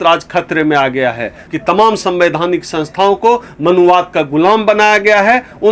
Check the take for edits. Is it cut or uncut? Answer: cut